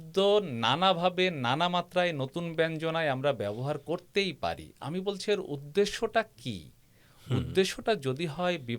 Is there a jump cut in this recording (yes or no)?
no